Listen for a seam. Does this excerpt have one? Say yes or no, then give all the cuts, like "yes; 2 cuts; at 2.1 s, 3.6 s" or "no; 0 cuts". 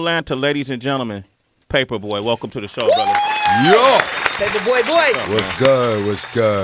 no; 0 cuts